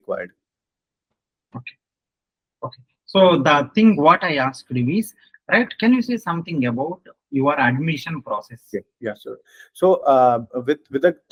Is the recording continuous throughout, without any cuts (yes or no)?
yes